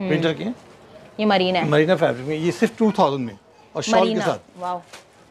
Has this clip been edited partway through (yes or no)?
no